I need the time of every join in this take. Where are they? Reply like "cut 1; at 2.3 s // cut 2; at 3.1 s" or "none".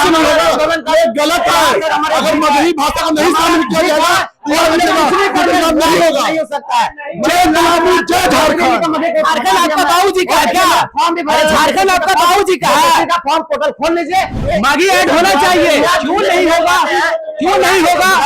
cut 1; at 14.4 s